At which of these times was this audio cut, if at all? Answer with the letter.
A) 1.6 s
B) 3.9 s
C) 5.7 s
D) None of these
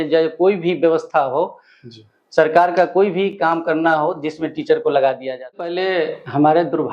C